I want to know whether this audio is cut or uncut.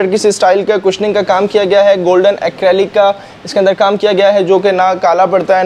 uncut